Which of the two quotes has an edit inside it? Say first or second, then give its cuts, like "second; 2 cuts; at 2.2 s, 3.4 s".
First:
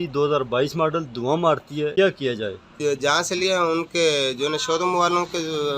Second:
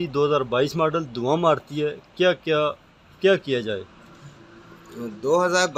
first; 2 cuts; at 1.9 s, 2.7 s